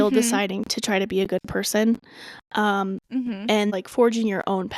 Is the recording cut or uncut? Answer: cut